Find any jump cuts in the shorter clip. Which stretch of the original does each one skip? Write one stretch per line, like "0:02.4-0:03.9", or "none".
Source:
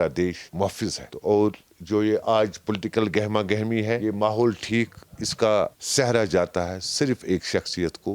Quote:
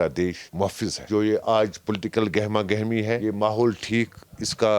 0:00.9-0:01.7